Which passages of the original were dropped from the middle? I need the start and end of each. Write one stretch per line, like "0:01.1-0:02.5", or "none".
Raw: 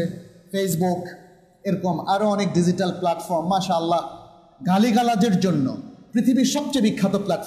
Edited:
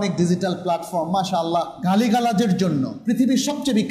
0:04.1-0:04.6
0:05.8-0:06.0